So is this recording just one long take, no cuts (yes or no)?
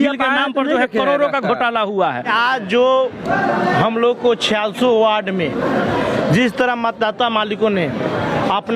yes